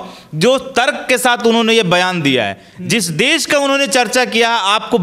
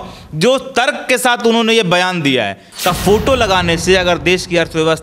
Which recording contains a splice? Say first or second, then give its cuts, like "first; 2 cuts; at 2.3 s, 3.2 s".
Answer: second; 1 cut; at 2.6 s